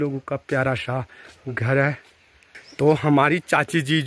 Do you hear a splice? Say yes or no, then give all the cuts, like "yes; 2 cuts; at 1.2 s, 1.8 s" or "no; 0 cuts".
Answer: no; 0 cuts